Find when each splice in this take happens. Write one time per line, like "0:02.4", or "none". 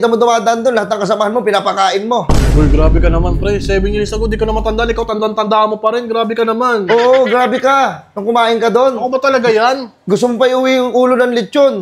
none

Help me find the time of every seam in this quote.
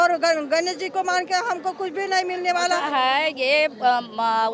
0:02.8

